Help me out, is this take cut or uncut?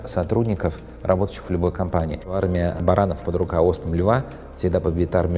cut